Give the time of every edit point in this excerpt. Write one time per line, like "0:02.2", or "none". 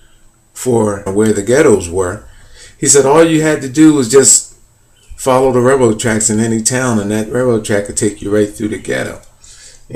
none

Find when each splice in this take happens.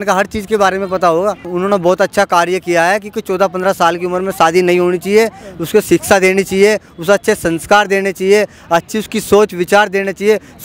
0:01.5

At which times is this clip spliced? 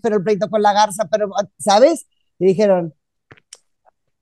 none

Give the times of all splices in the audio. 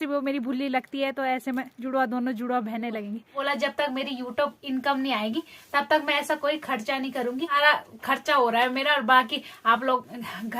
0:03.4
0:07.6

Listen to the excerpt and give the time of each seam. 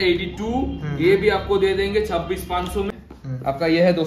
0:02.9

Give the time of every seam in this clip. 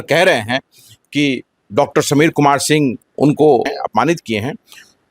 0:03.0
0:03.7

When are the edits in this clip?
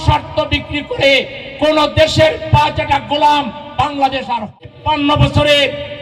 0:04.5

